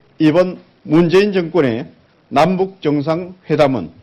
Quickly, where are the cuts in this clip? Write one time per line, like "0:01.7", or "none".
0:02.5